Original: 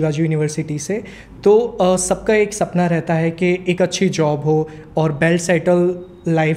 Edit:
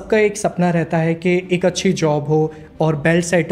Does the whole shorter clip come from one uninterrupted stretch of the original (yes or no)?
yes